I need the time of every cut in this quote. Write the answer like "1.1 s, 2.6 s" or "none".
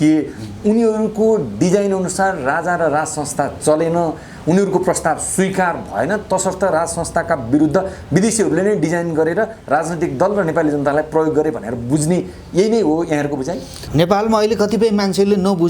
13.7 s